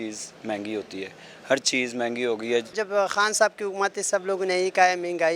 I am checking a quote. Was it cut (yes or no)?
no